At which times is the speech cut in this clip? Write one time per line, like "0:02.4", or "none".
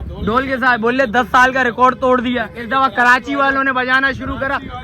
none